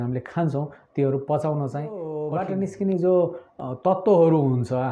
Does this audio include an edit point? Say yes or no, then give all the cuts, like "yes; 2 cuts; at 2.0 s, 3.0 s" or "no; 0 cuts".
yes; 1 cut; at 2.2 s